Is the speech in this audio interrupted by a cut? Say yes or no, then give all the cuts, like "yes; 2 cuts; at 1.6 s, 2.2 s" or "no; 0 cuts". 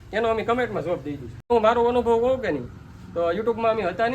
yes; 1 cut; at 1.5 s